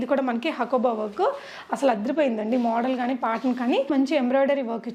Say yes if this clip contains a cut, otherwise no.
yes